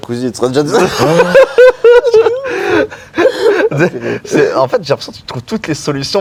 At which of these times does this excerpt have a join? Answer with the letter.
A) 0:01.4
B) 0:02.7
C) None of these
C